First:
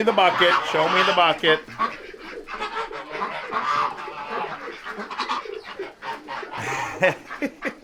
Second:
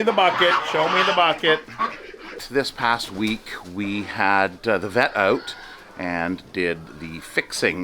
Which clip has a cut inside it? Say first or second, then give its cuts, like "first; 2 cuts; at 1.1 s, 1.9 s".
second; 1 cut; at 2.4 s